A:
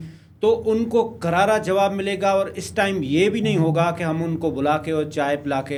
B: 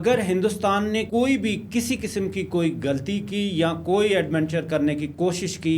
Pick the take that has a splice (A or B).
B